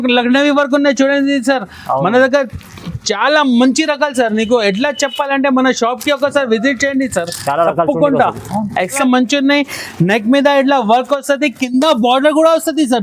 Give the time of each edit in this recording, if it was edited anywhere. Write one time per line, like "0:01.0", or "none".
0:09.0